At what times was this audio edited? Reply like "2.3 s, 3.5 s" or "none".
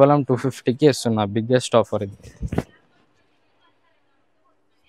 none